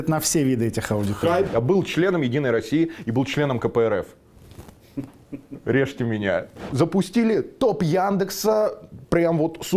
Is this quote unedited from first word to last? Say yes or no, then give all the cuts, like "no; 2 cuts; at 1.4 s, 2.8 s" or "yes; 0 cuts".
no; 2 cuts; at 1.2 s, 6.6 s